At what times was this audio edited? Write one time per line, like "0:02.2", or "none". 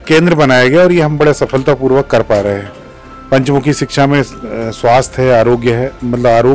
none